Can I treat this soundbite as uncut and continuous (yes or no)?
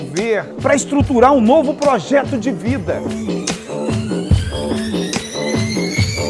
yes